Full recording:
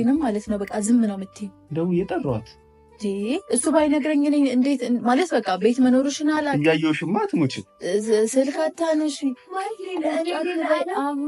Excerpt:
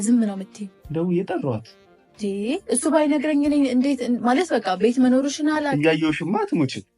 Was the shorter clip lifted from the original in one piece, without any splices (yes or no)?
yes